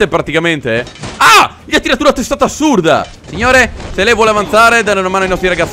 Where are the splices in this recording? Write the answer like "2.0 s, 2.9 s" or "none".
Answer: 3.3 s